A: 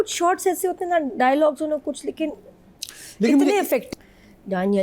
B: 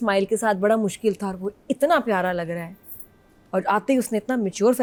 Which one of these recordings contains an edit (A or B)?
A